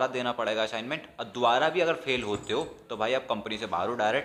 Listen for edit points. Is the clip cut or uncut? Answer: uncut